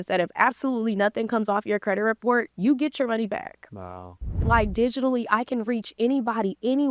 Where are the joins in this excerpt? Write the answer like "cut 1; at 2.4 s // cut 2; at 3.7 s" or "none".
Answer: cut 1; at 4.4 s